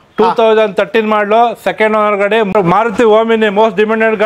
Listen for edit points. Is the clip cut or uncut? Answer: cut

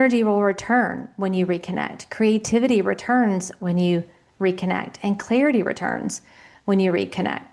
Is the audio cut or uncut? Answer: uncut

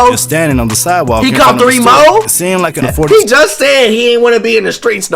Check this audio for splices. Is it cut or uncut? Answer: cut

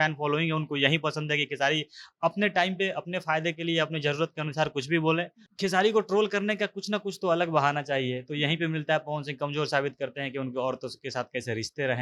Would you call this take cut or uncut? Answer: cut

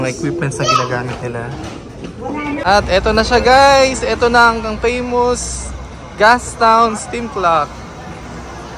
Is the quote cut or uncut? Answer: cut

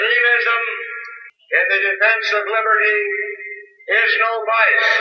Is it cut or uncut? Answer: uncut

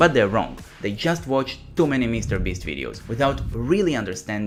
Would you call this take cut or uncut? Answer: uncut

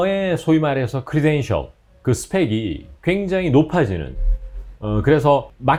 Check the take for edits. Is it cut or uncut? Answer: uncut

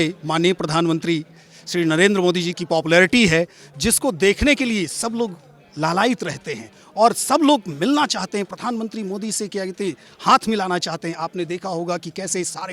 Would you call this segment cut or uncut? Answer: uncut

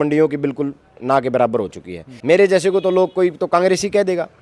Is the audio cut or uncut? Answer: cut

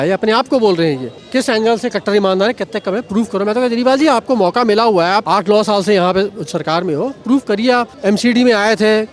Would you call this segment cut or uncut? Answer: cut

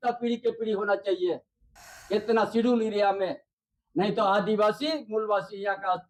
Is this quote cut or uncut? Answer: uncut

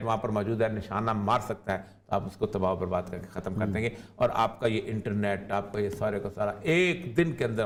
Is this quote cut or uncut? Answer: uncut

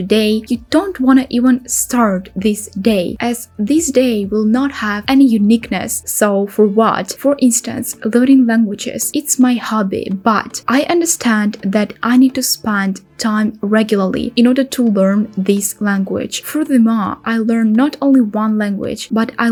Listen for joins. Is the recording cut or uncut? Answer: uncut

